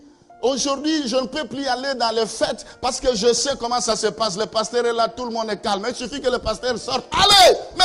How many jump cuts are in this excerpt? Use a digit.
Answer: 0